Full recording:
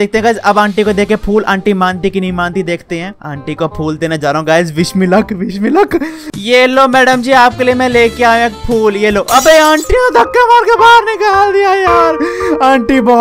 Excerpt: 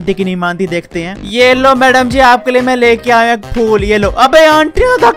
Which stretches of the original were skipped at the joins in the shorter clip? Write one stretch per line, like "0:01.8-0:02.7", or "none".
0:03.1-0:06.3